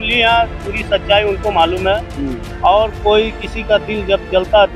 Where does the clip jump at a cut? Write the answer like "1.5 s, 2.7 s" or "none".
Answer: none